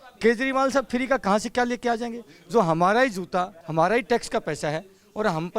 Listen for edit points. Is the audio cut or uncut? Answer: cut